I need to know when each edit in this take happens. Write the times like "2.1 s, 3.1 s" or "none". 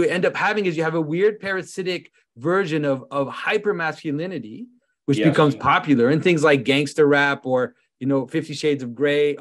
none